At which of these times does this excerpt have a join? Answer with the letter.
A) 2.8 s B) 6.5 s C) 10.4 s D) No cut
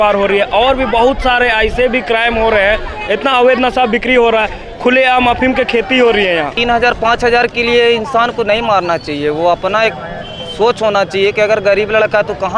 B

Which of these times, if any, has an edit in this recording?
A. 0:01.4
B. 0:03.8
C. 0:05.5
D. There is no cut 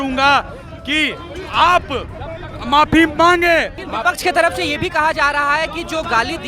B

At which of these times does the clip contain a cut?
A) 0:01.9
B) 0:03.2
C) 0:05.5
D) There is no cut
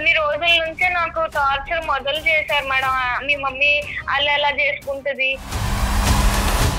C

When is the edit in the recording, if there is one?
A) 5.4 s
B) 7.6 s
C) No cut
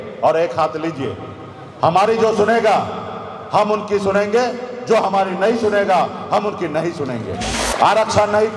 B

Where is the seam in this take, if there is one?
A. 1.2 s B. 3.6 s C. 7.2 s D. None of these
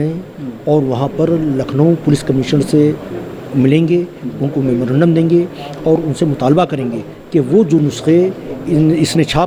D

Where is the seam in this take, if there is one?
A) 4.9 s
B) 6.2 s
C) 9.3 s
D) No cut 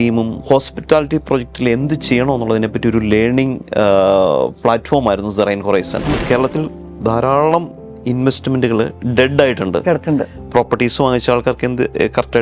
B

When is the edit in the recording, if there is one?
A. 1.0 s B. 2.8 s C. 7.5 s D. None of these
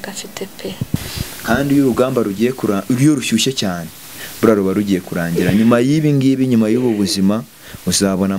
A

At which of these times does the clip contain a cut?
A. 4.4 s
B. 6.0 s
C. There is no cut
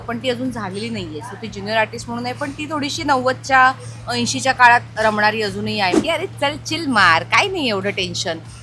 B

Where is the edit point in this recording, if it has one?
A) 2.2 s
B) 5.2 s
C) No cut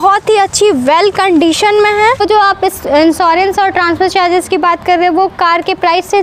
A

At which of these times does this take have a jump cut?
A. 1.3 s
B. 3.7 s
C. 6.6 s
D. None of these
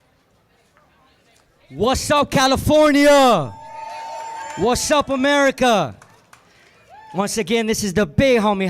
B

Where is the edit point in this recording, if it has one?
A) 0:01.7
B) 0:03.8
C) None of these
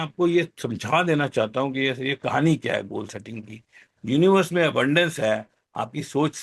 B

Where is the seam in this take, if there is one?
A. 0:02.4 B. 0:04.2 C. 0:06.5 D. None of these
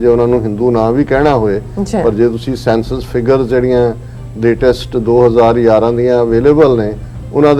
D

